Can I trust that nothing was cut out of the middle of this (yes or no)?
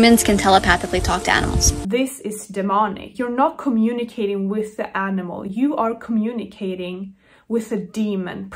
no